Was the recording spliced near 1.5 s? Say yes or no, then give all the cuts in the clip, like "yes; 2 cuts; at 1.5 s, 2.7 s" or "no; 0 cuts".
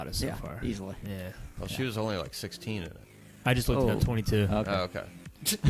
yes; 1 cut; at 1.5 s